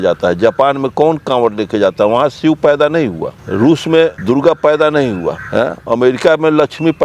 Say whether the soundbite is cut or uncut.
cut